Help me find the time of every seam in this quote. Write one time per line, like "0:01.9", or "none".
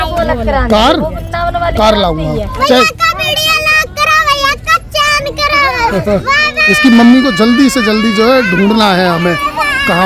0:02.5
0:06.2